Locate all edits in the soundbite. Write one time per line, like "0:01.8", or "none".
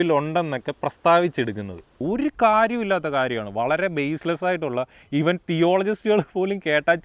0:01.9